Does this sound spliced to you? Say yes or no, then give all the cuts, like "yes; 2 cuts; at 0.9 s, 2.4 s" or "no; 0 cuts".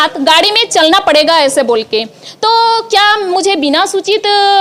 no; 0 cuts